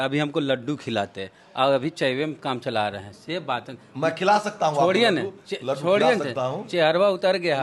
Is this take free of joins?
yes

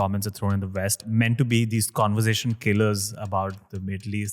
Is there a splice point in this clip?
yes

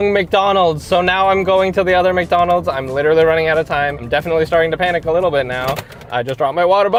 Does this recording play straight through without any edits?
yes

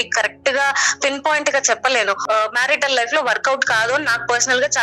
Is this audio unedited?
no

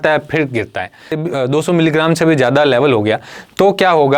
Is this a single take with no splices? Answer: no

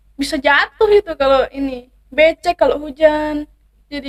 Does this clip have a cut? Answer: no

